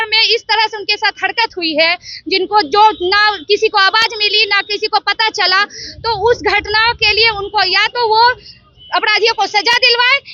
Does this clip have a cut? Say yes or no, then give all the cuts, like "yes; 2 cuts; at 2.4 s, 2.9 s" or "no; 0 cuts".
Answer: no; 0 cuts